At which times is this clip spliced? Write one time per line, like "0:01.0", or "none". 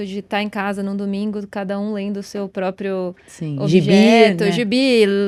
none